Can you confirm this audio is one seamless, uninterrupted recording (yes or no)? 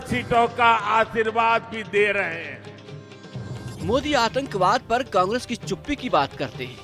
yes